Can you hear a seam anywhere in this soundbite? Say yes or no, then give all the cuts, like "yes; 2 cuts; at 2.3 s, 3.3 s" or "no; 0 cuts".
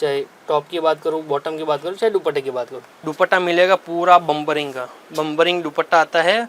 yes; 1 cut; at 3.0 s